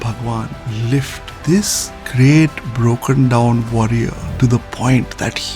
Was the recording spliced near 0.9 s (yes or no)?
yes